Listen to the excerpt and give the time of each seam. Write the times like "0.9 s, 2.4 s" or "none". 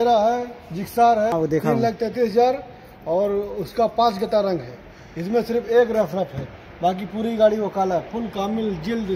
1.3 s